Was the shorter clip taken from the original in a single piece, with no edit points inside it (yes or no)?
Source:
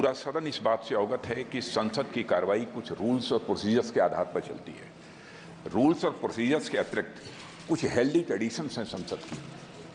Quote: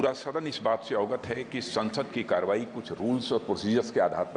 yes